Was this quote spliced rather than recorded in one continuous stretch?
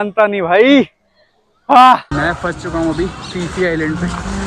yes; 1 cut; at 2.1 s

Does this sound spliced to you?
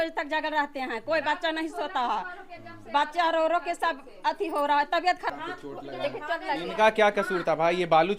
yes; 1 cut; at 5.3 s

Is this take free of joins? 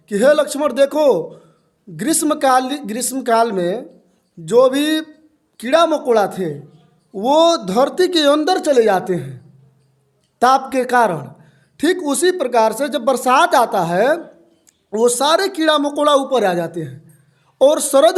yes; 0 cuts

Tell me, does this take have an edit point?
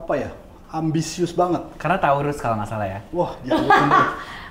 no; 0 cuts

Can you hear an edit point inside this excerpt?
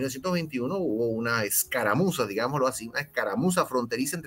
no; 0 cuts

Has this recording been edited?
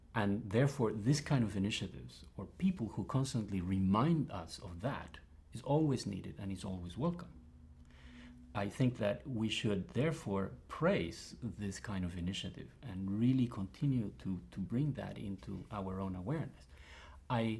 yes; 1 cut; at 14.2 s

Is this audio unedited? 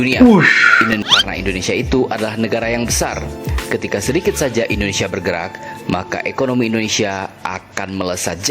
no; 1 cut; at 1.1 s

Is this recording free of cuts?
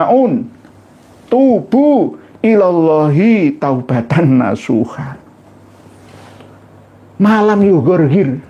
yes; 0 cuts

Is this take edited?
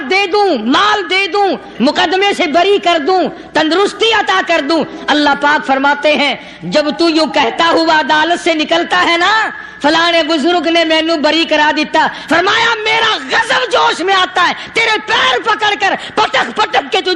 no; 0 cuts

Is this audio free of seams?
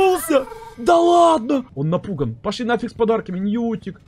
no; 1 cut; at 1.7 s

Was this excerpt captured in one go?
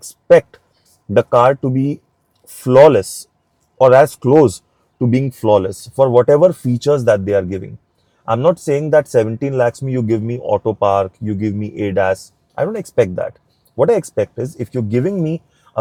yes; 0 cuts

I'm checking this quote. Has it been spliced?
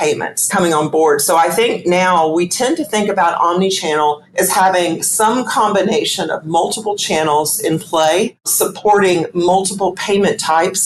yes; 1 cut; at 8.4 s

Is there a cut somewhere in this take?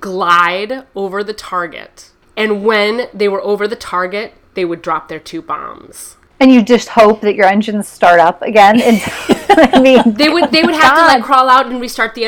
no; 0 cuts

